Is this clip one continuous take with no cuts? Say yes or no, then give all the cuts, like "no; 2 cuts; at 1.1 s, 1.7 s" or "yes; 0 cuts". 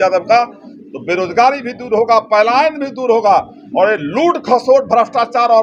yes; 0 cuts